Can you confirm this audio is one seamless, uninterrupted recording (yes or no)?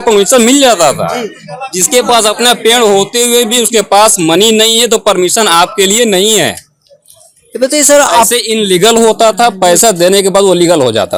yes